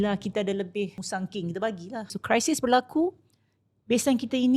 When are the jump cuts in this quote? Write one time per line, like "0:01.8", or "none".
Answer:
0:01.0
0:02.2